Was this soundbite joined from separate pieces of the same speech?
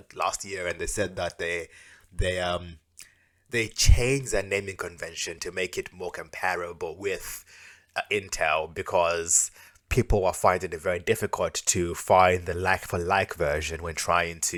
no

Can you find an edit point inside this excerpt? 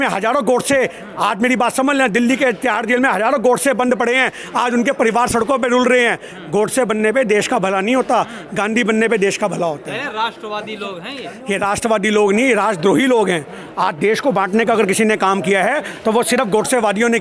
no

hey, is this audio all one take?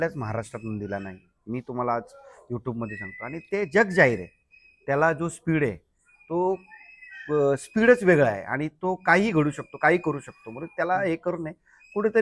yes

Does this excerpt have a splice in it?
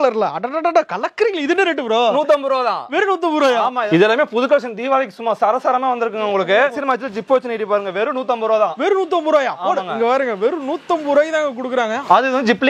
no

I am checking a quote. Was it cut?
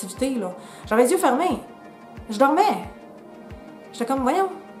no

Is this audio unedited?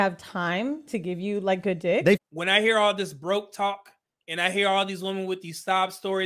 no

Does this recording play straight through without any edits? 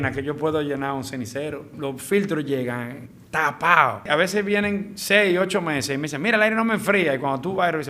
no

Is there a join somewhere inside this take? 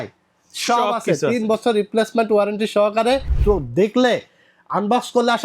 yes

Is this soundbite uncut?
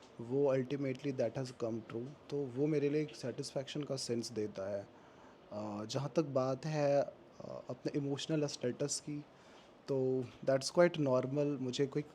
yes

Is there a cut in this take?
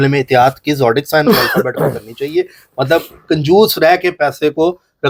no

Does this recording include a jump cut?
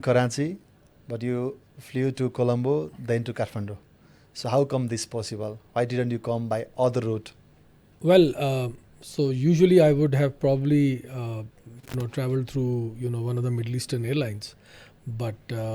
no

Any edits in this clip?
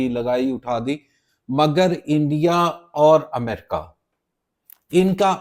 no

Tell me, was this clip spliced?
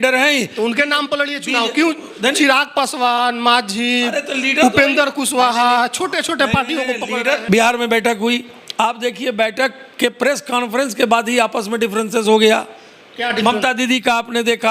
yes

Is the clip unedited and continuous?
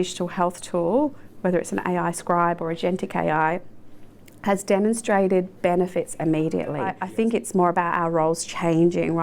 no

